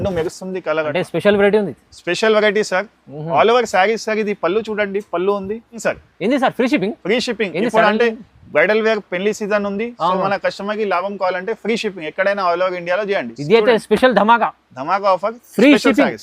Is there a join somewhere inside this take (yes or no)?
yes